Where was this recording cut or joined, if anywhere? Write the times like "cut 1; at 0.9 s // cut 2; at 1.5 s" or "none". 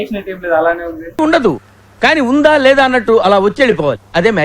cut 1; at 1.0 s